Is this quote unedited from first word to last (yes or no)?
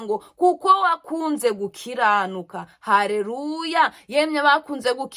yes